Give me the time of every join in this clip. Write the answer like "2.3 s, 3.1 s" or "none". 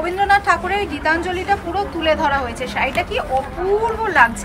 none